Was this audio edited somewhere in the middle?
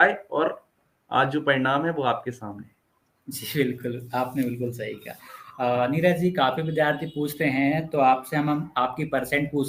no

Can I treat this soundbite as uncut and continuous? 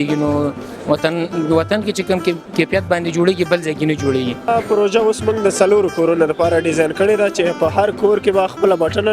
no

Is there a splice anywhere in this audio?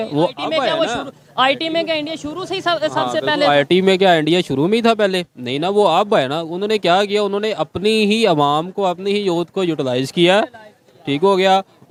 no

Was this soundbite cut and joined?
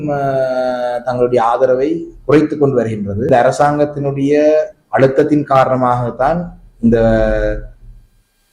yes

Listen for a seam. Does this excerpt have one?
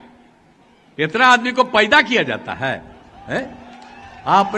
no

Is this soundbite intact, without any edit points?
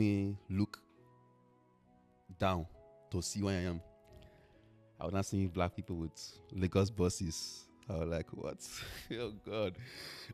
yes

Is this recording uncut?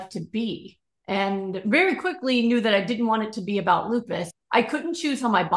no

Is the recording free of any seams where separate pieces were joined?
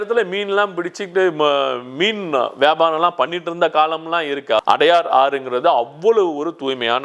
no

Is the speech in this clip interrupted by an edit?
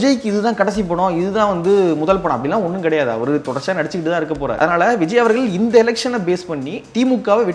yes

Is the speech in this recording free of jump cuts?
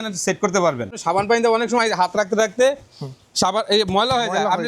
no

